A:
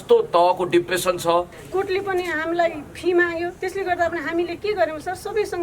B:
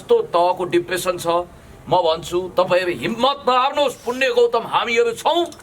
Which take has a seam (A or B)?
A